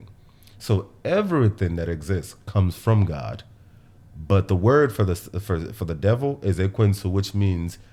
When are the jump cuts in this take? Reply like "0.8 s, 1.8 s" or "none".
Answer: none